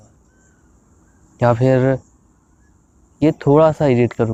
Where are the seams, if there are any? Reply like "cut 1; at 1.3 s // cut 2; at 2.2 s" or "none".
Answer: none